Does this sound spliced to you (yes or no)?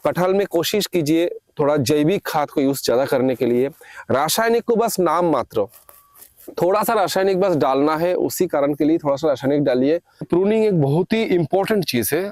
yes